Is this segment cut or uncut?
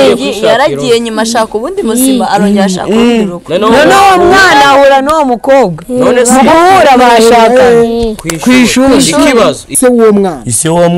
cut